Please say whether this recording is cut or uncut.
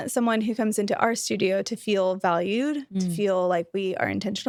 uncut